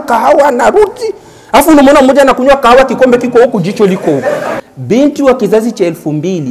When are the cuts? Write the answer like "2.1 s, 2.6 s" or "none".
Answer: 4.5 s

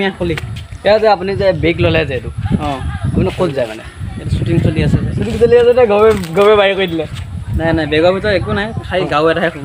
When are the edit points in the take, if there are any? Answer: none

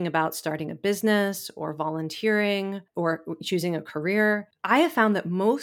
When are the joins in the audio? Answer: 2.9 s, 4.5 s

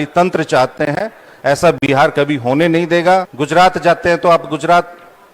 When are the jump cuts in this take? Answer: 3.3 s

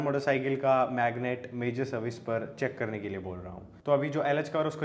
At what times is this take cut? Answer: none

